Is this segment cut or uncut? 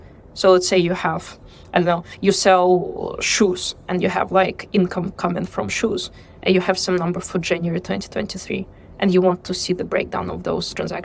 uncut